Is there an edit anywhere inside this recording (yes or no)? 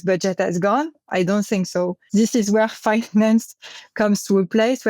yes